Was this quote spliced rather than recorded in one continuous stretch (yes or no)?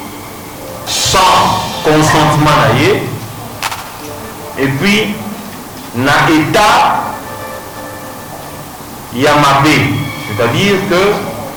no